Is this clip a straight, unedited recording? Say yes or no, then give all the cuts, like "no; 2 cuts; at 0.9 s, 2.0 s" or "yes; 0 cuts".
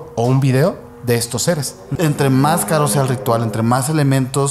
no; 1 cut; at 1.9 s